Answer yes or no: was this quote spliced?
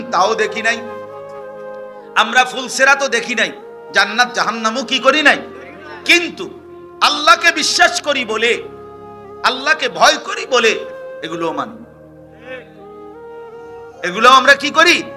yes